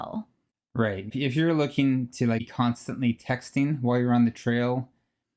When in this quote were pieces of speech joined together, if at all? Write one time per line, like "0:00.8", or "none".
0:01.1
0:02.5